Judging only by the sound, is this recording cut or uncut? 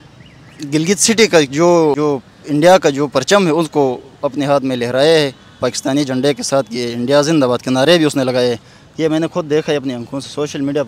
uncut